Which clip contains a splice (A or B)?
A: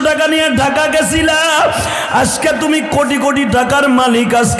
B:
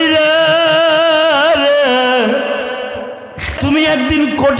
B